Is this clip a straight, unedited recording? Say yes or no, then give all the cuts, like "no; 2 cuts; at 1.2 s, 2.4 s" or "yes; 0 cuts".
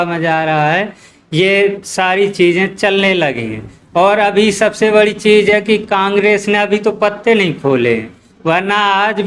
yes; 0 cuts